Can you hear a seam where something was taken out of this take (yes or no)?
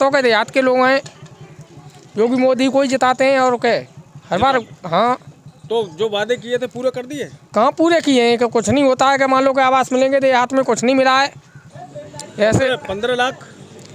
no